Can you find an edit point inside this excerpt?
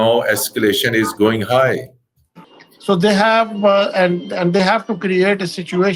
yes; 1 cut; at 2.2 s

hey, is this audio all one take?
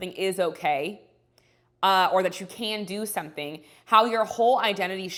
yes; 0 cuts

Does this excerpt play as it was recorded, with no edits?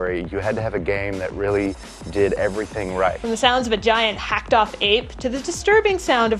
no; 1 cut; at 3.2 s

